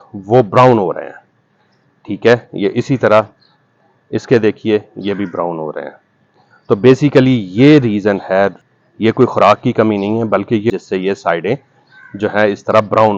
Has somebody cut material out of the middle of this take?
yes; 2 cuts; at 8.6 s, 10.7 s

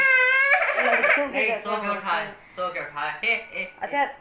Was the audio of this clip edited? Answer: no; 0 cuts

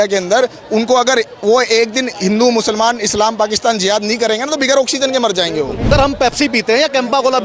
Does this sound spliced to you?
yes; 1 cut; at 5.9 s

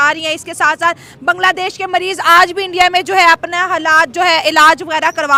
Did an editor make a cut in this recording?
no; 0 cuts

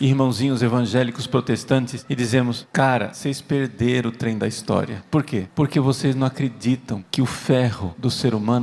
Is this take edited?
yes; 1 cut; at 1.2 s

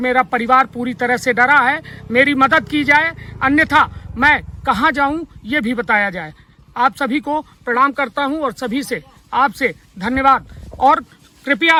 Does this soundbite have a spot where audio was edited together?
no; 0 cuts

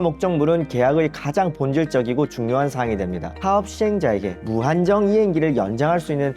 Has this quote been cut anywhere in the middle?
yes; 1 cut; at 3.3 s

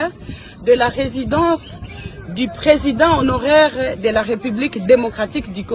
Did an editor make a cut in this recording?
no; 0 cuts

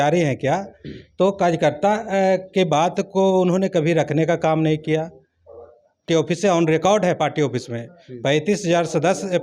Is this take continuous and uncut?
no; 1 cut; at 6.0 s

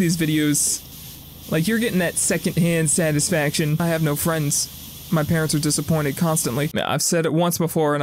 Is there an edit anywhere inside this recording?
yes; 2 cuts; at 3.8 s, 6.7 s

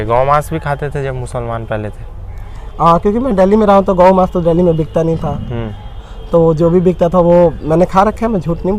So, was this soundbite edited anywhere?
no; 0 cuts

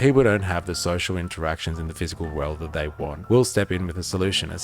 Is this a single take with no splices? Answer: no; 1 cut; at 3.2 s

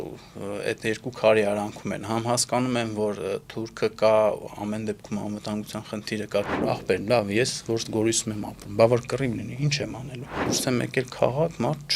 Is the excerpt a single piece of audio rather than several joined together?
no; 2 cuts; at 6.6 s, 10.5 s

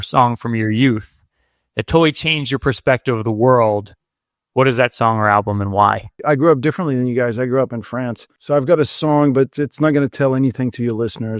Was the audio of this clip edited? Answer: yes; 2 cuts; at 6.2 s, 8.3 s

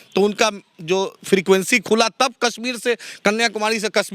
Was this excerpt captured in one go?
yes; 0 cuts

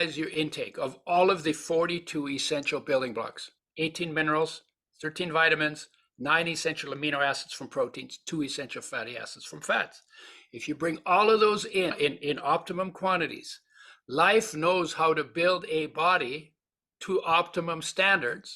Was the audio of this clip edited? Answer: yes; 1 cut; at 11.9 s

